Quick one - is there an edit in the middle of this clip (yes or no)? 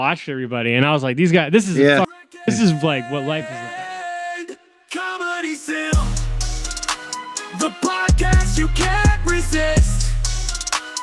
yes